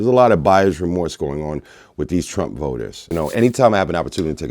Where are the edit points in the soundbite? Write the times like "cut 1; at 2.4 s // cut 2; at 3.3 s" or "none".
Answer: cut 1; at 3.1 s